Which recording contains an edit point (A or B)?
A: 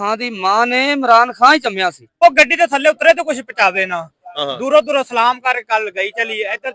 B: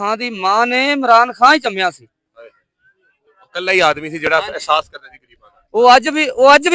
A